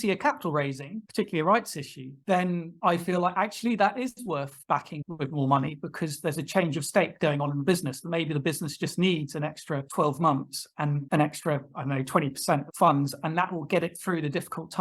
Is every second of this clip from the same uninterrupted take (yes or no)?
yes